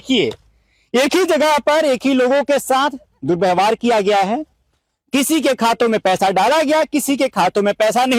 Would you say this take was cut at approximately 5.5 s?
no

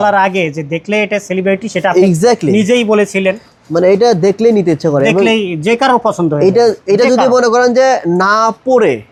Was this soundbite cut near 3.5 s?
no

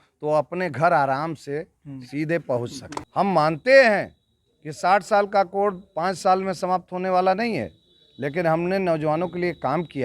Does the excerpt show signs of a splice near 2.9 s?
yes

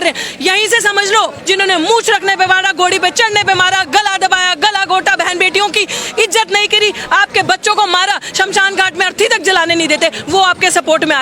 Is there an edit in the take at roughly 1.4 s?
yes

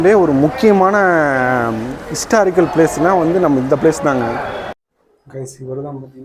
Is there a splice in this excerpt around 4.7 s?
yes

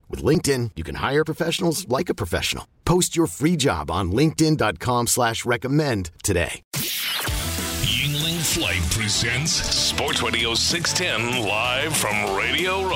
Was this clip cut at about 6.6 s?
yes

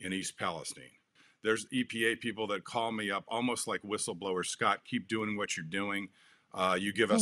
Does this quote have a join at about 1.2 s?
yes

